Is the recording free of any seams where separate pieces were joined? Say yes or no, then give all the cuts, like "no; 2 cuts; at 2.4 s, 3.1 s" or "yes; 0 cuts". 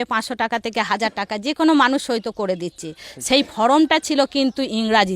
yes; 0 cuts